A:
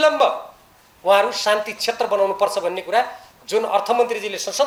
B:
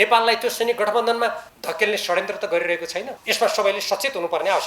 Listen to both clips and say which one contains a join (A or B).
B